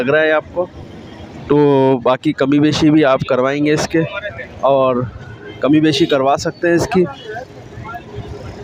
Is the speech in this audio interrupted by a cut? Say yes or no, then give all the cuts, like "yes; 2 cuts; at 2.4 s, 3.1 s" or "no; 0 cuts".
no; 0 cuts